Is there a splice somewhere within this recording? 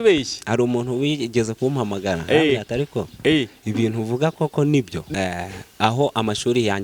yes; 1 cut; at 5.0 s

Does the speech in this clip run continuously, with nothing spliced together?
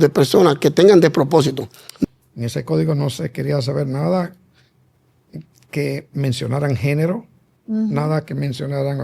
no; 1 cut; at 2.0 s

